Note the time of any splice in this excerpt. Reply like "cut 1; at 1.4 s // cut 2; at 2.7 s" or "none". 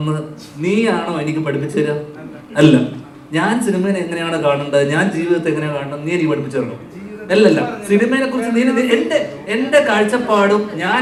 none